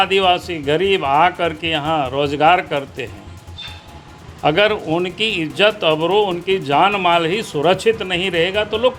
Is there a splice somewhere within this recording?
no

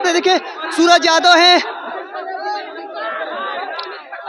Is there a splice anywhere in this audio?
no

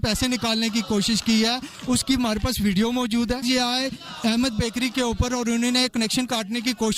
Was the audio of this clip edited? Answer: yes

